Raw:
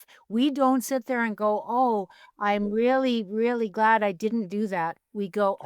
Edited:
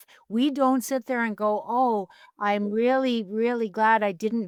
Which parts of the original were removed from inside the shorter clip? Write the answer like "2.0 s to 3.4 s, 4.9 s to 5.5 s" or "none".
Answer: none